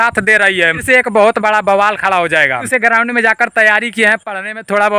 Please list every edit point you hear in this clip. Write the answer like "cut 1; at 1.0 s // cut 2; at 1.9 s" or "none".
cut 1; at 0.8 s // cut 2; at 2.7 s